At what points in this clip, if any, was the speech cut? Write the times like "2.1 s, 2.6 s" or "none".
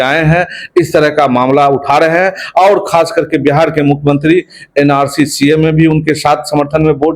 none

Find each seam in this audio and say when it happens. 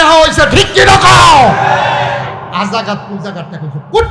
2.5 s

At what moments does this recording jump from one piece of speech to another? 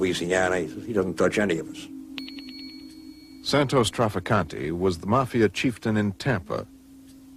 5.5 s

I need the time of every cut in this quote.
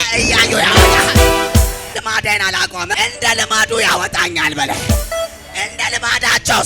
1.9 s, 3.0 s

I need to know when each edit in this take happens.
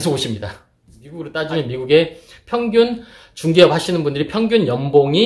1.3 s

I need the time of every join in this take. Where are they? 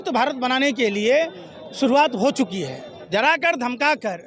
3.0 s

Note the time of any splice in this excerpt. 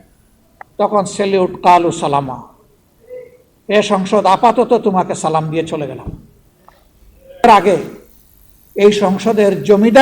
7.4 s

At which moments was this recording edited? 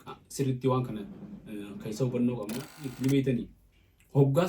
2.9 s

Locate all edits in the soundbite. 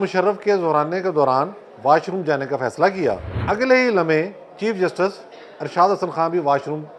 3.3 s

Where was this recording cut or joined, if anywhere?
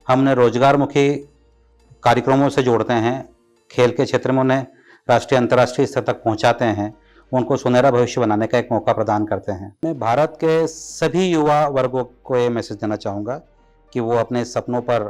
9.7 s

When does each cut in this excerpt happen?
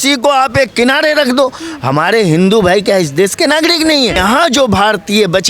4.2 s

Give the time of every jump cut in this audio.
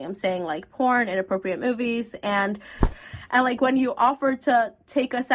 2.9 s

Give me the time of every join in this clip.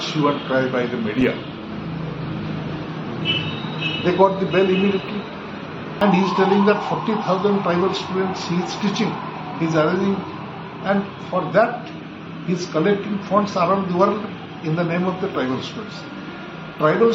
6.0 s

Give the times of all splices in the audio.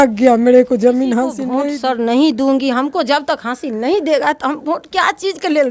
1.4 s

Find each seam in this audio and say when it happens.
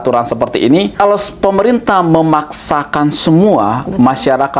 1.0 s

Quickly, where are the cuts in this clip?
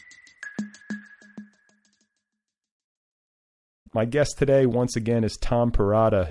none

